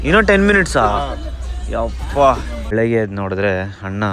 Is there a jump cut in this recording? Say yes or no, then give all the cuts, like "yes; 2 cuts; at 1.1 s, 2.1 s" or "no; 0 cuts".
yes; 1 cut; at 2.5 s